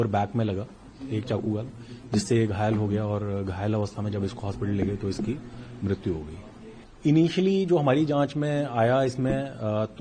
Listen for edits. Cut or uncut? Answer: uncut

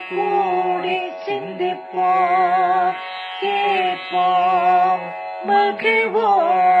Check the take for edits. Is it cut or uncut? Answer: uncut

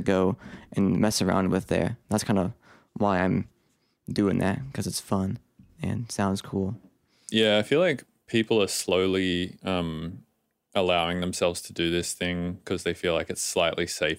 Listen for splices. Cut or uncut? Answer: cut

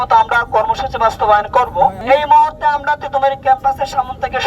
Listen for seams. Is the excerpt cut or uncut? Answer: cut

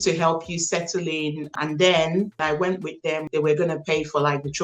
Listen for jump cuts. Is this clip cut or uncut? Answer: cut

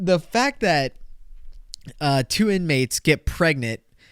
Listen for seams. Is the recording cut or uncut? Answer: uncut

